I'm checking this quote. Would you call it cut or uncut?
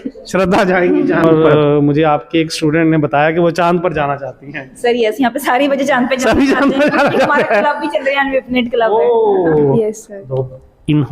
cut